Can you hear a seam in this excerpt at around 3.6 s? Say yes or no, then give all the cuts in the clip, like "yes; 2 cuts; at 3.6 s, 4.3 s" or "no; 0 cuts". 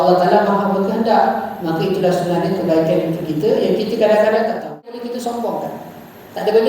no; 1 cut; at 5.1 s